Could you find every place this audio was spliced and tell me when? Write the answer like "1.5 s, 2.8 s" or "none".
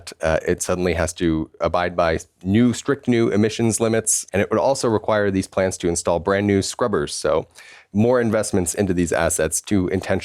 4.2 s

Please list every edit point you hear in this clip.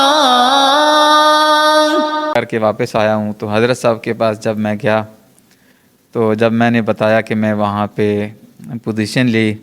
2.3 s

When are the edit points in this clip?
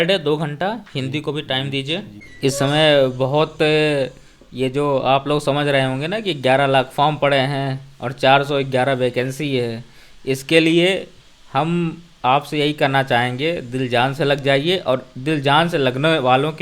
2.1 s

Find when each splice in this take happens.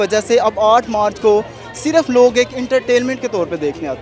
none

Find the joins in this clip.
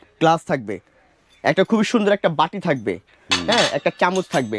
none

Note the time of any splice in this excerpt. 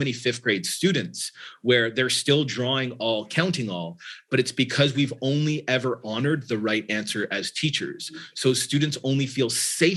none

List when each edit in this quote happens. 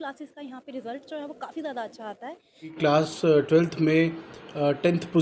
2.7 s

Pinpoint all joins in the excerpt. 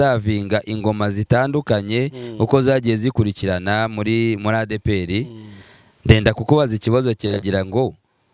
none

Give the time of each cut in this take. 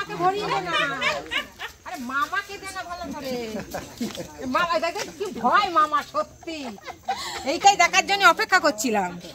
none

